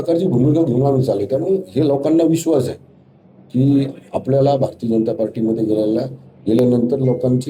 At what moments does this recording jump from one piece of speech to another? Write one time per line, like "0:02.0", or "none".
none

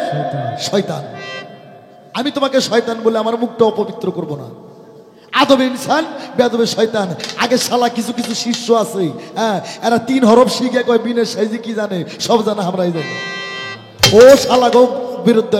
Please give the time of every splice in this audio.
none

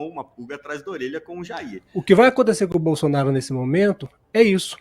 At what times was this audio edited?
0:01.8

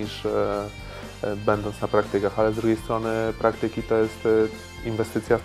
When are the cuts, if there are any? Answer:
none

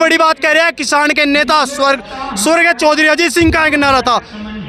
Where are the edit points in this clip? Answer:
none

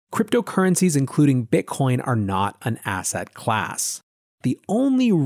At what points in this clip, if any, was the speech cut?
0:04.3

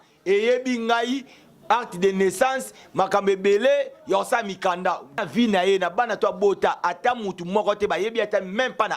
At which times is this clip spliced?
0:05.2

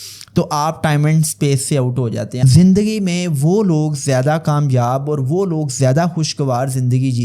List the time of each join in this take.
0:02.4

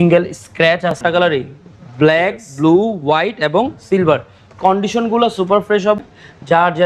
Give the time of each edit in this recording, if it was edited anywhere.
0:01.0
0:06.0

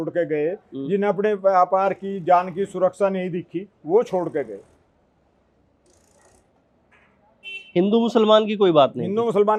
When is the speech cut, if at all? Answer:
none

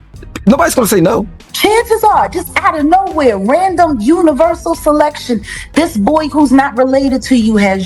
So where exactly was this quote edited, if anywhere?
0:01.5

